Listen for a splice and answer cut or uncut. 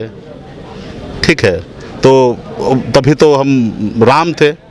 uncut